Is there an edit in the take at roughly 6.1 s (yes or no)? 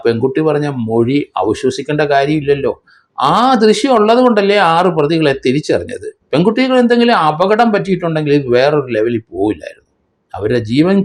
no